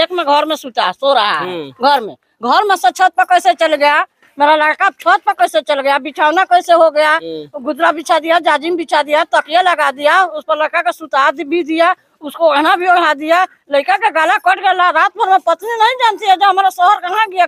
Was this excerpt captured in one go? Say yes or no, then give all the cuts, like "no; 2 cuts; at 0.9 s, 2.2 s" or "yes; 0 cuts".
yes; 0 cuts